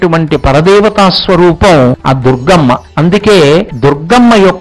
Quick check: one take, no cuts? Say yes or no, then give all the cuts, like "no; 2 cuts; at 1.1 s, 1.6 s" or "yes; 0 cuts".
no; 3 cuts; at 2.0 s, 2.9 s, 3.7 s